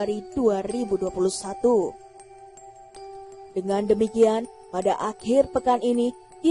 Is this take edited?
yes; 2 cuts; at 1.9 s, 3.5 s

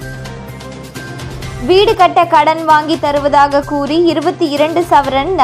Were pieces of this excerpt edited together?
no; 0 cuts

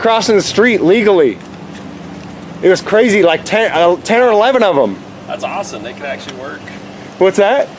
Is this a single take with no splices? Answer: yes; 0 cuts

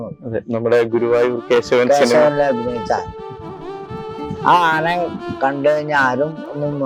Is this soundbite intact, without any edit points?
yes; 0 cuts

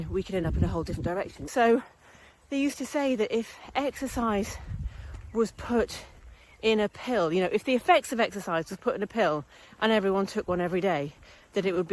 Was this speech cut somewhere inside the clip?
yes; 1 cut; at 1.4 s

